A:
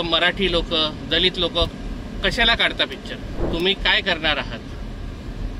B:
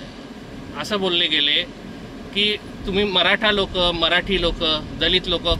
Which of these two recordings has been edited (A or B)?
A